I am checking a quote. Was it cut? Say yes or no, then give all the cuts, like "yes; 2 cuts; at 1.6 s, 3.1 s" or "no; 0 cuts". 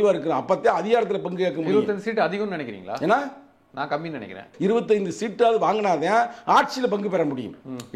yes; 1 cut; at 4.5 s